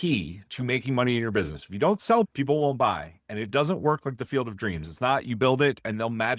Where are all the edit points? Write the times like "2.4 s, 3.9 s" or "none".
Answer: none